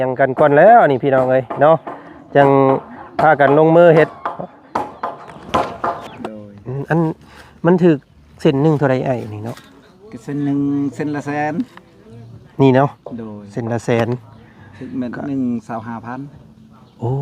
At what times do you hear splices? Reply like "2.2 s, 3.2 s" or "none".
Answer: 6.2 s

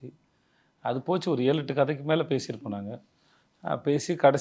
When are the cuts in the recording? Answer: none

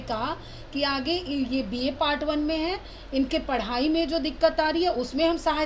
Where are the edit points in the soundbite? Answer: none

